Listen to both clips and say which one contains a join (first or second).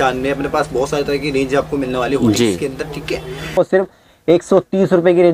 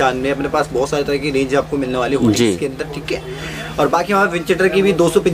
first